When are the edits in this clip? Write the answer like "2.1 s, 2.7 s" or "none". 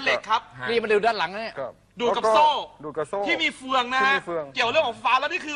none